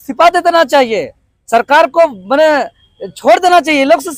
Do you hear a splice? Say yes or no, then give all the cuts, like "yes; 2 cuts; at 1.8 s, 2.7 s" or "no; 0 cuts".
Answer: no; 0 cuts